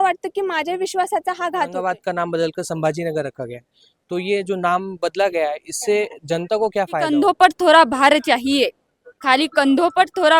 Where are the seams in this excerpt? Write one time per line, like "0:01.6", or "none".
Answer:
0:01.8
0:07.1

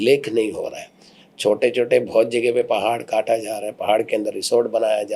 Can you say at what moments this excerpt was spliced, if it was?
none

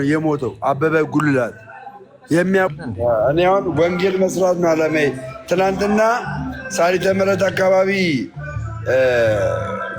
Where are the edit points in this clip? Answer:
0:02.7

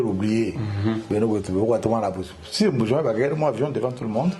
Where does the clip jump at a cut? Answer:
none

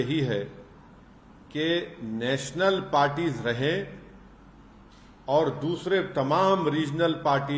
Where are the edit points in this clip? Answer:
none

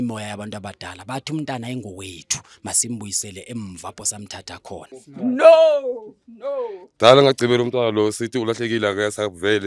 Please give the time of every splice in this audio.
0:05.0

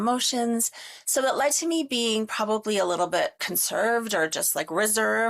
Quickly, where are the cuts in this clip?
0:03.4

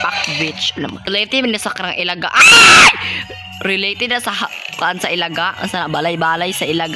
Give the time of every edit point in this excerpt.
0:01.1

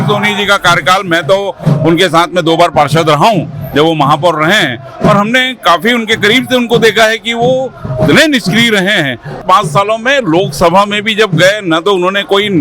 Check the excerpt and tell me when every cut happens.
0:09.4

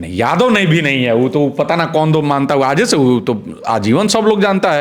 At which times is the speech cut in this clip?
none

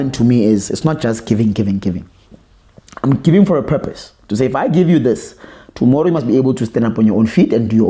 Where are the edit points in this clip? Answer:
none

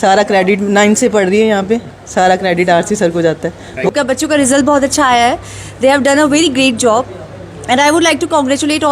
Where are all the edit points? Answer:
0:03.9

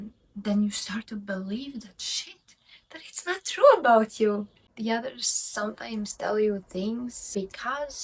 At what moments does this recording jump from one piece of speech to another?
0:04.6
0:07.3

